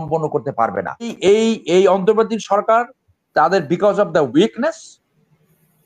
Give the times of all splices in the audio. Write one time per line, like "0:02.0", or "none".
0:01.1